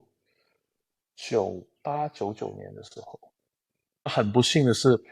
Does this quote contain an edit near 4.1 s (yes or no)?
yes